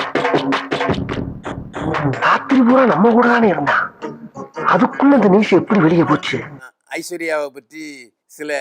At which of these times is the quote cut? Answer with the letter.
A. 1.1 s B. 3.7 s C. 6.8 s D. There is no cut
A